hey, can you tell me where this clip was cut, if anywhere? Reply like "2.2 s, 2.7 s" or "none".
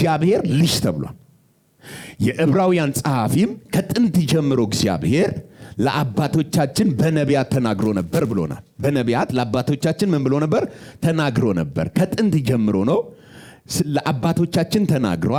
none

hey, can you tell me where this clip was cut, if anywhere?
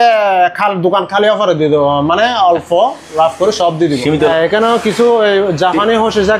4.3 s

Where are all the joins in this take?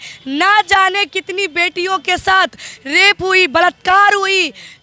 none

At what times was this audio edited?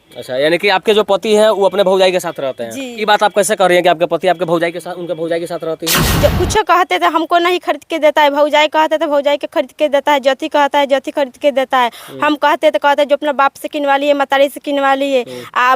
6.1 s

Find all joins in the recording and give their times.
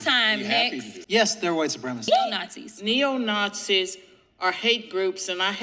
0.9 s, 2.3 s

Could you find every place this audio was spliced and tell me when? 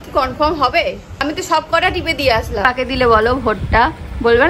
1.2 s, 2.7 s

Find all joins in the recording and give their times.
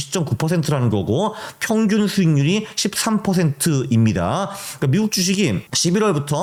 none

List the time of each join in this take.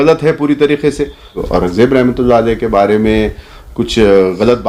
1.4 s

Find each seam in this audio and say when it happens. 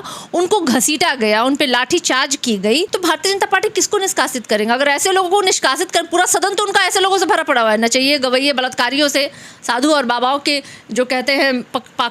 2.9 s

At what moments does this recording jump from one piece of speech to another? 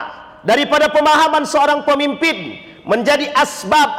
none

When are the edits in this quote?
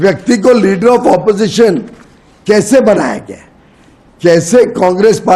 none

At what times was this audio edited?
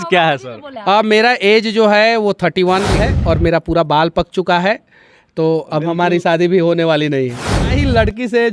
3.0 s, 7.7 s

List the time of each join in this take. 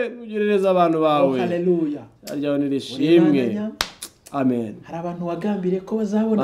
none

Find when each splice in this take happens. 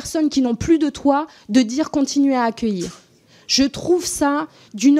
none

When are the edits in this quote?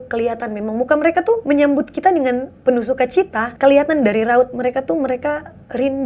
1.4 s, 3.4 s

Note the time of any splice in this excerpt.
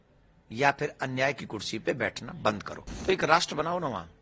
3.0 s

